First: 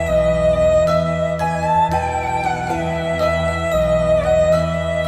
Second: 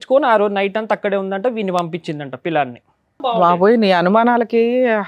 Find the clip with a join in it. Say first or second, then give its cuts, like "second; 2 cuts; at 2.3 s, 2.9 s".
second; 1 cut; at 3.4 s